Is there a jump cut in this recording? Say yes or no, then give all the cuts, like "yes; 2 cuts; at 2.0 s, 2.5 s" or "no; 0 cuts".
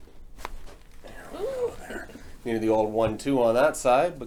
no; 0 cuts